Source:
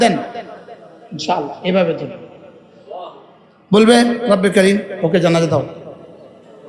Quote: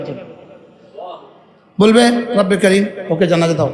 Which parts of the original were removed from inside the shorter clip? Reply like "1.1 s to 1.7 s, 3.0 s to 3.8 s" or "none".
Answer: none